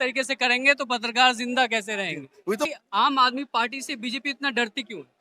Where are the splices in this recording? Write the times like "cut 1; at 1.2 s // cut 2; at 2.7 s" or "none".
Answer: cut 1; at 2.7 s